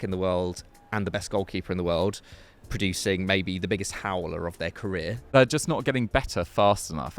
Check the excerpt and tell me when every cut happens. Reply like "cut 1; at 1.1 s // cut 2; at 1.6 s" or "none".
cut 1; at 5.3 s